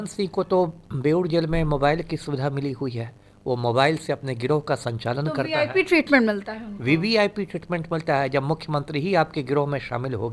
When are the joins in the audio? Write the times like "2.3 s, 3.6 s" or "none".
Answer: none